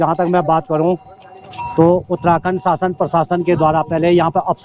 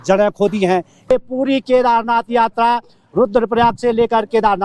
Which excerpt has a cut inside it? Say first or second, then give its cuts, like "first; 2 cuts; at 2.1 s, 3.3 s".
second; 1 cut; at 1.1 s